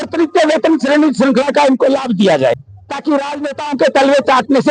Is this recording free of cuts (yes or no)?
no